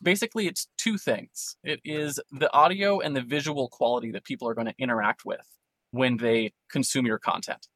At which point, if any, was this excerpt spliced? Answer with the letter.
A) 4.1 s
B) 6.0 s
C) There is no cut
B